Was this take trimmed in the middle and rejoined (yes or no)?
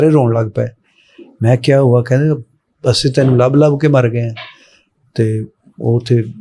no